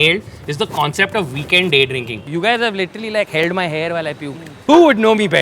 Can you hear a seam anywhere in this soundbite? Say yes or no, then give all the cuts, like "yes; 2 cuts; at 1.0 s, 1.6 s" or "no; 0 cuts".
yes; 2 cuts; at 2.2 s, 4.5 s